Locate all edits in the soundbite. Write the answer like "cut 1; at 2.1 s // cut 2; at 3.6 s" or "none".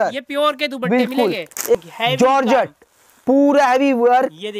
cut 1; at 1.7 s